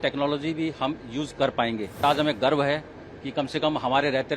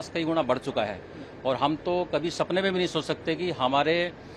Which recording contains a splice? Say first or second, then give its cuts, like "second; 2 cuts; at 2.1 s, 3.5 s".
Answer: first; 1 cut; at 2.0 s